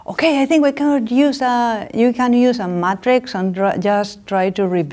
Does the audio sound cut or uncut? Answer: uncut